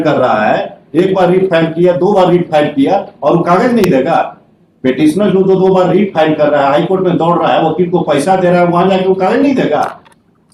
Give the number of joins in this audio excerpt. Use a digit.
0